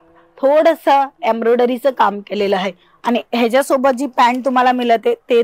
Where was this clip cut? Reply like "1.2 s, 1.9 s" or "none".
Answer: none